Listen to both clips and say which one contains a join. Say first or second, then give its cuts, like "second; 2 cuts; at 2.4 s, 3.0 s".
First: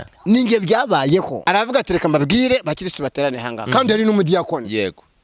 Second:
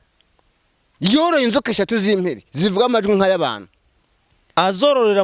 first; 1 cut; at 1.3 s